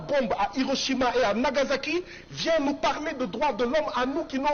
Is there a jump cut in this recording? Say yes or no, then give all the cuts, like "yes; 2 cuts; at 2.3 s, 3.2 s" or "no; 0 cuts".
no; 0 cuts